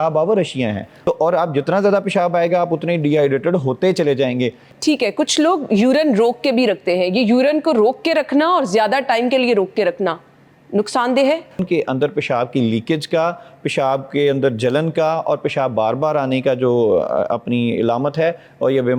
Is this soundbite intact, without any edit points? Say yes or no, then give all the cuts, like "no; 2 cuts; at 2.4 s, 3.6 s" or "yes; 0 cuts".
no; 3 cuts; at 0.9 s, 4.7 s, 11.6 s